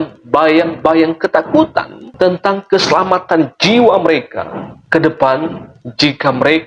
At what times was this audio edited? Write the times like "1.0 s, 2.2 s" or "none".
none